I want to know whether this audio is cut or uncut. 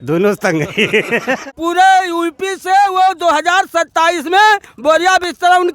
cut